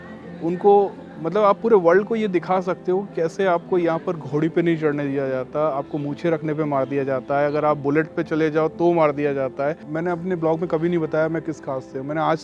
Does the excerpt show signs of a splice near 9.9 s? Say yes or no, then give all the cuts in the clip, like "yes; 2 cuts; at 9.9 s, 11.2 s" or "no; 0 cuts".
yes; 1 cut; at 9.9 s